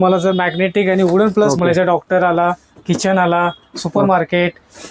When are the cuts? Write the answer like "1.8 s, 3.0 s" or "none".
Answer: 1.5 s

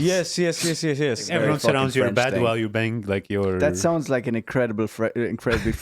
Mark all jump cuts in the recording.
1.3 s

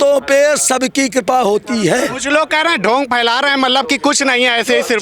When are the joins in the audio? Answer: none

